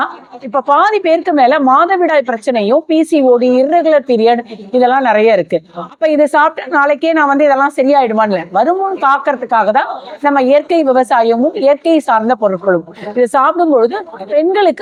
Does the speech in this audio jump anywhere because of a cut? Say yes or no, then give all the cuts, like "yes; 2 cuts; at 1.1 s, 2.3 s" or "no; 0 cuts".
no; 0 cuts